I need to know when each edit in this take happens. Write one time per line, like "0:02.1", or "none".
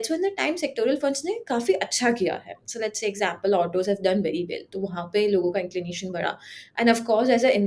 none